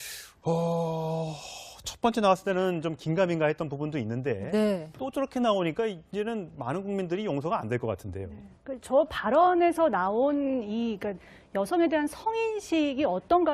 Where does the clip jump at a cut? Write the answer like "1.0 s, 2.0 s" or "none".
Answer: 7.1 s